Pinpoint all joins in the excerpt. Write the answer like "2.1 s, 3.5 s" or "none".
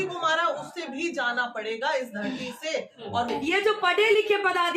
3.3 s

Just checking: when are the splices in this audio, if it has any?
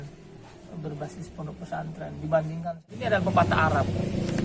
2.9 s

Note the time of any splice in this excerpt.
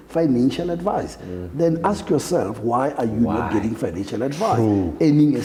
none

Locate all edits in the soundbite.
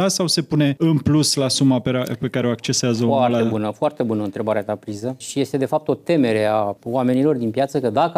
0.8 s, 5.2 s, 6.8 s

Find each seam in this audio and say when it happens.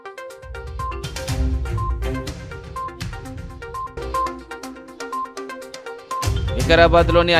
2.8 s, 3.9 s

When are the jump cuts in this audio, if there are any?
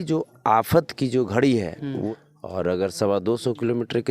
2.1 s

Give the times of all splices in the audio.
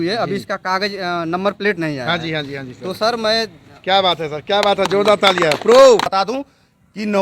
6.1 s

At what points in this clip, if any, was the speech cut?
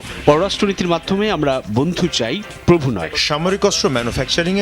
3.1 s

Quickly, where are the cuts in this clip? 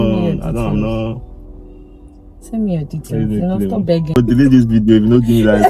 4.2 s

